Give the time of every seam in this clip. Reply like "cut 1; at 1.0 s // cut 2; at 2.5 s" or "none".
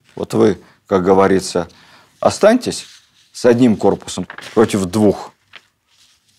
none